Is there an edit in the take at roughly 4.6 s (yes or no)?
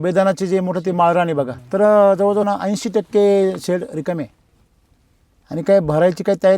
no